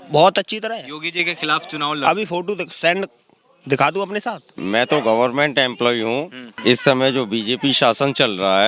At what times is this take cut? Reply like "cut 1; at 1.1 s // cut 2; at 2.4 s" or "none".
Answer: cut 1; at 4.5 s // cut 2; at 6.4 s